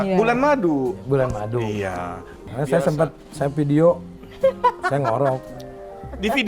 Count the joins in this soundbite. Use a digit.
1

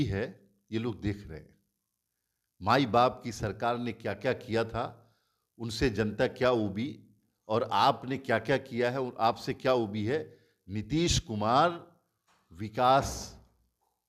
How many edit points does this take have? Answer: 0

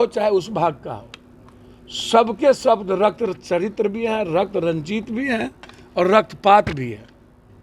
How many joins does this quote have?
0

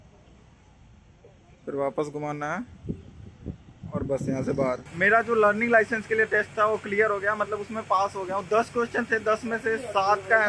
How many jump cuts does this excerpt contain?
1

